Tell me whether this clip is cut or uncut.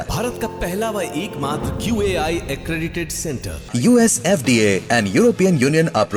uncut